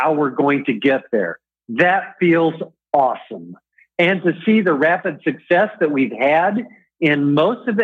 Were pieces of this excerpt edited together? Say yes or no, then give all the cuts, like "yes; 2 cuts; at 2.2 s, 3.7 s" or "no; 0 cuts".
no; 0 cuts